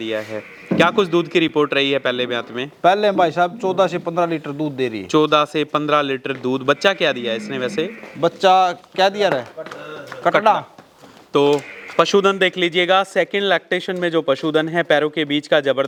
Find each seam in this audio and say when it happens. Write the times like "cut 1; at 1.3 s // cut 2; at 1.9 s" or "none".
none

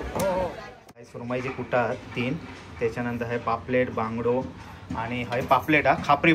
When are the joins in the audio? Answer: cut 1; at 1.1 s

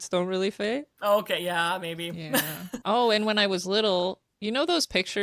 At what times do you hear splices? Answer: cut 1; at 0.9 s // cut 2; at 2.7 s

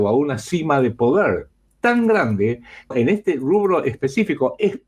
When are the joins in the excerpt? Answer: cut 1; at 2.9 s

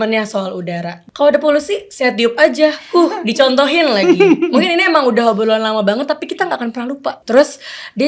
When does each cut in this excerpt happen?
cut 1; at 1.0 s // cut 2; at 7.2 s

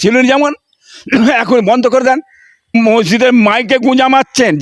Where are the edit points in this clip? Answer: cut 1; at 2.7 s

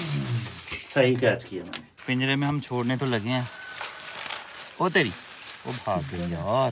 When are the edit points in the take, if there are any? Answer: cut 1; at 1.9 s

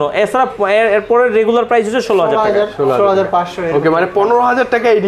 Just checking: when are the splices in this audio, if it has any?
none

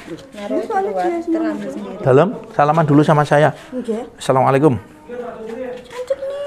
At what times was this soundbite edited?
none

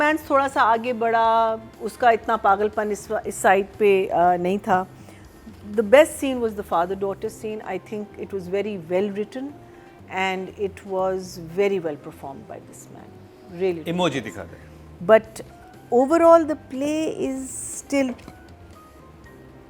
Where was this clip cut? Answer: none

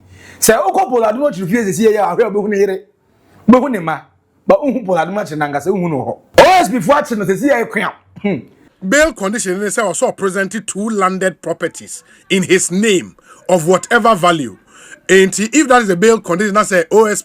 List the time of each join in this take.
cut 1; at 6.2 s // cut 2; at 8.6 s

